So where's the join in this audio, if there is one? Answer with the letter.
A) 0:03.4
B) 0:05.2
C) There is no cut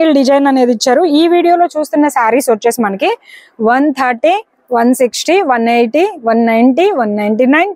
C